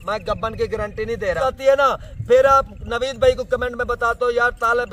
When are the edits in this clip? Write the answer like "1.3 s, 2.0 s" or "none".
1.4 s